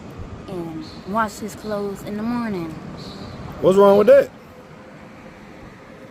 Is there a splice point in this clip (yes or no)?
no